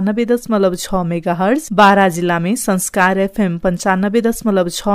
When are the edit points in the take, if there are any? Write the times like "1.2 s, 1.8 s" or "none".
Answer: 1.7 s